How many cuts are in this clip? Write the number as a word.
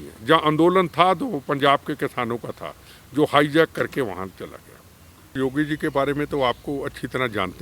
one